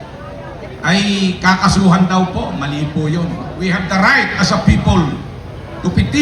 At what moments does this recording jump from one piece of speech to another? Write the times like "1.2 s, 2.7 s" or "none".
3.5 s

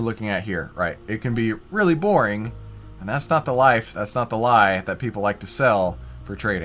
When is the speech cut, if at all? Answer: none

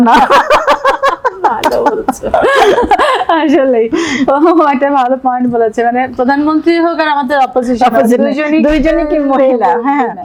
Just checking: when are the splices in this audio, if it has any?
none

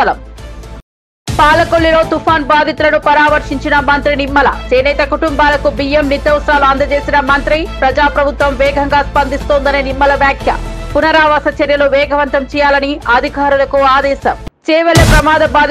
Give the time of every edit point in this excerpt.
14.5 s

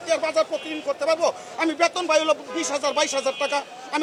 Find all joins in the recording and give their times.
none

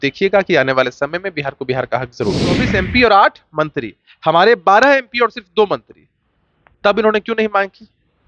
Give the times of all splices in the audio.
2.6 s

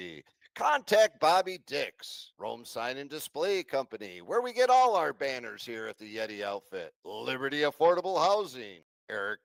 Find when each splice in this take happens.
none

